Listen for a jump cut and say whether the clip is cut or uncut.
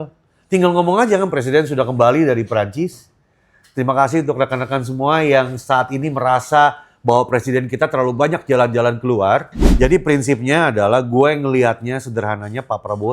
cut